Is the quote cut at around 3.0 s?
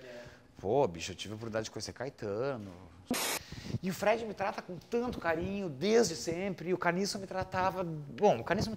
yes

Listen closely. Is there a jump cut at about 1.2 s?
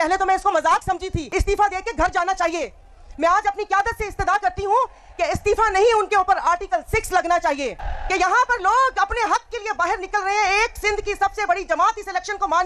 yes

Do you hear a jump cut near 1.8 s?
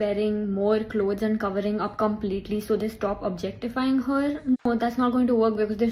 no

